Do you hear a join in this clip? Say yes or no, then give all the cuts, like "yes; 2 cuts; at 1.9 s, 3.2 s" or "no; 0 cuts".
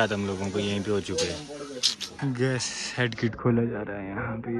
yes; 1 cut; at 2.0 s